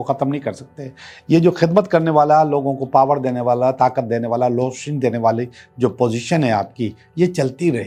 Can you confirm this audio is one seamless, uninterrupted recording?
yes; 0 cuts

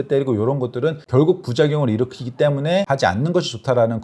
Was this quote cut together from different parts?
yes; 2 cuts; at 1.0 s, 2.9 s

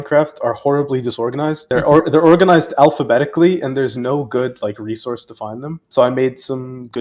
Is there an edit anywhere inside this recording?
no; 0 cuts

